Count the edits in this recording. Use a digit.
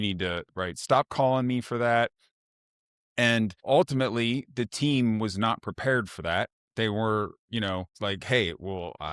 2